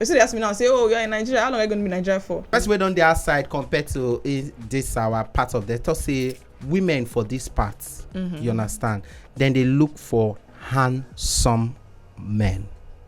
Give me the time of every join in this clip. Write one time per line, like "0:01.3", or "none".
0:02.5